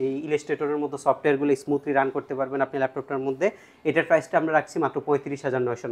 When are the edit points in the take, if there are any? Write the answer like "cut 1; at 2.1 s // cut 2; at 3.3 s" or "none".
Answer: none